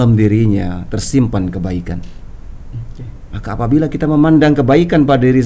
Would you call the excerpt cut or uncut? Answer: uncut